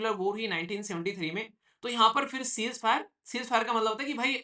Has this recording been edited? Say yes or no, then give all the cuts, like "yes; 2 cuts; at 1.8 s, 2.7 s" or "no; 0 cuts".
no; 0 cuts